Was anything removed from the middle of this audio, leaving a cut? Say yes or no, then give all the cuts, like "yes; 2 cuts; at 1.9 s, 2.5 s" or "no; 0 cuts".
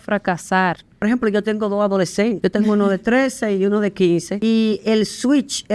yes; 3 cuts; at 1.0 s, 2.4 s, 4.3 s